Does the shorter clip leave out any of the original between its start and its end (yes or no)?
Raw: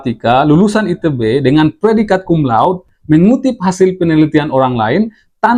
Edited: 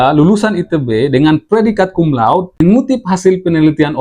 yes